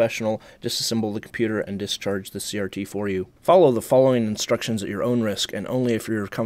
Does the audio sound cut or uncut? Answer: cut